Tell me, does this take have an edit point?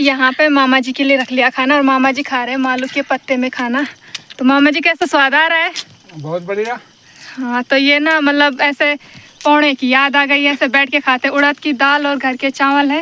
no; 0 cuts

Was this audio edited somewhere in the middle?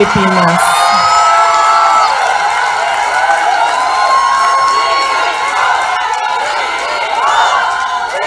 no; 0 cuts

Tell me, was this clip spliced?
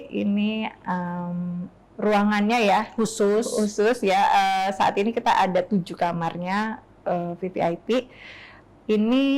no; 0 cuts

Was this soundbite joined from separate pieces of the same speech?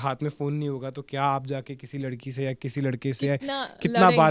no; 0 cuts

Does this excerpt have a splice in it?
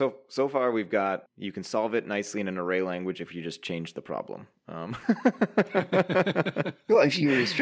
yes; 1 cut; at 1.3 s

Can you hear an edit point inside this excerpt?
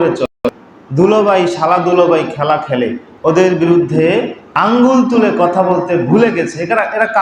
yes; 2 cuts; at 3.1 s, 4.4 s

